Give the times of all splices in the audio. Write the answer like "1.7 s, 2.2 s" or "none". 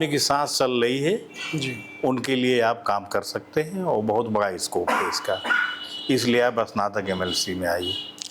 none

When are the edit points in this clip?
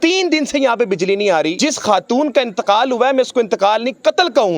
1.5 s

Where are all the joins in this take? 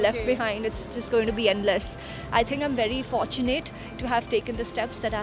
none

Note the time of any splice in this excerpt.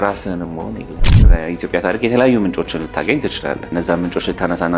1.3 s

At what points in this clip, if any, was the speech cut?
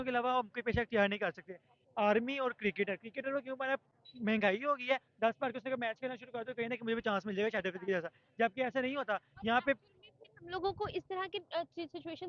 none

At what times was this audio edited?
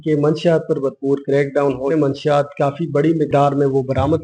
1.9 s, 3.3 s

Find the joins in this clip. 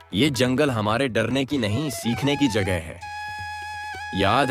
none

